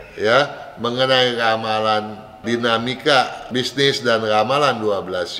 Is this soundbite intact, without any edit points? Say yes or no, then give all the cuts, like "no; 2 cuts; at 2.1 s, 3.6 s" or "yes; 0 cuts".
no; 2 cuts; at 2.4 s, 3.4 s